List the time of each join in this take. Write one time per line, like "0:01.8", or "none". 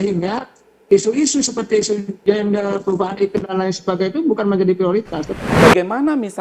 0:05.3